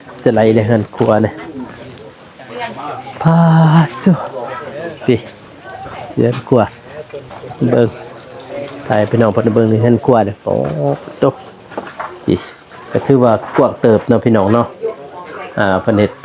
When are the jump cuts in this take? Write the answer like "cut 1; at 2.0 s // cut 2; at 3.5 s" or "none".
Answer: none